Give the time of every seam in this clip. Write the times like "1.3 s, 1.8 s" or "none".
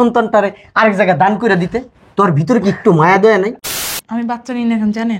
3.8 s